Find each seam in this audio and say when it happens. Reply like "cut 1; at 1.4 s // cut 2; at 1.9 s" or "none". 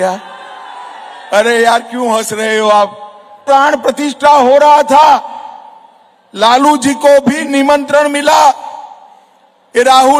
cut 1; at 3.4 s